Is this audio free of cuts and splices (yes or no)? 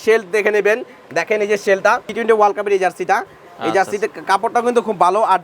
no